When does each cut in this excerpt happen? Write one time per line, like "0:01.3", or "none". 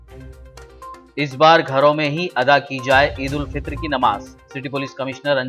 0:01.0